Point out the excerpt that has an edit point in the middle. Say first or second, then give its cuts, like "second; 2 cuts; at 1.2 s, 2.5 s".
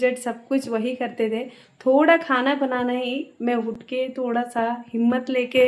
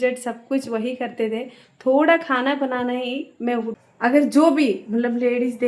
second; 1 cut; at 3.8 s